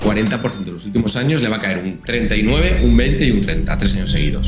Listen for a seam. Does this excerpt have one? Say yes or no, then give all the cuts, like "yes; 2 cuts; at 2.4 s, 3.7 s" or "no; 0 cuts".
no; 0 cuts